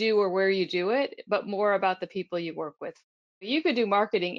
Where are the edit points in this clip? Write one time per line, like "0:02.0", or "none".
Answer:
0:03.5